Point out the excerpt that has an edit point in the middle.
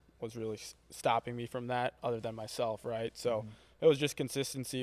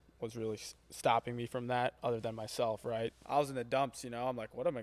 second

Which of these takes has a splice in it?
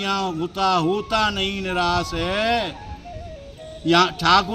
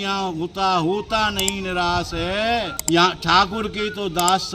second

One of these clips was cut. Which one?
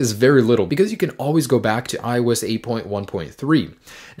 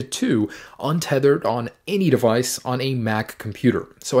first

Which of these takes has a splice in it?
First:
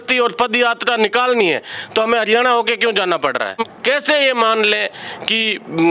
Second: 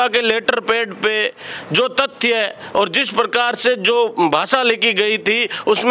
first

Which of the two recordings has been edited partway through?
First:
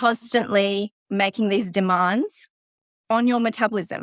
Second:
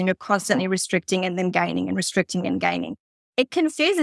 first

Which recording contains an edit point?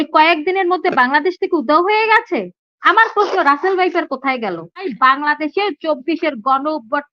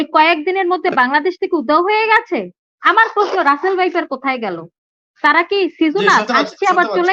first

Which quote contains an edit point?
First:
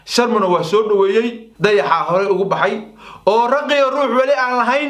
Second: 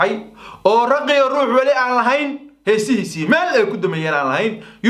first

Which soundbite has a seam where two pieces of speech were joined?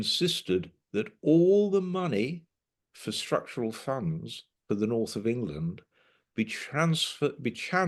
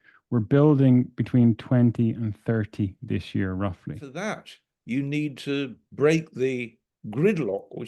second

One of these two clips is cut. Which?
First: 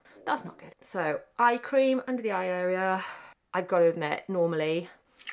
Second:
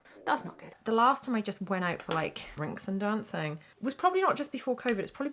second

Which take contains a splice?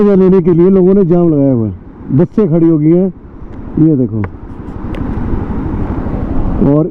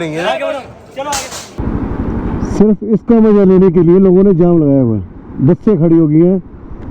second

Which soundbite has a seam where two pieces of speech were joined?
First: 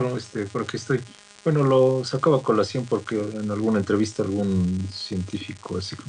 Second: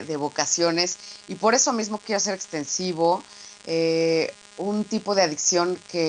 first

